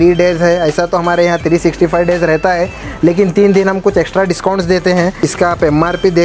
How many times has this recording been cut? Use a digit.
1